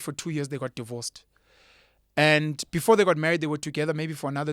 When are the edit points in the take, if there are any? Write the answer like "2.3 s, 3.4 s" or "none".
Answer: none